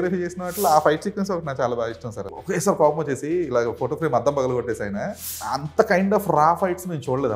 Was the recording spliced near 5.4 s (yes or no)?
yes